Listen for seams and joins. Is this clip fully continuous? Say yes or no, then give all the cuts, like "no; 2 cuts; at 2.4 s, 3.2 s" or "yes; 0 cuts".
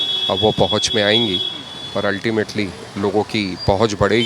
yes; 0 cuts